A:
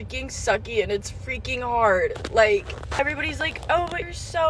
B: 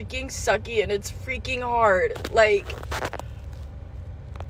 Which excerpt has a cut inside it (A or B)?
A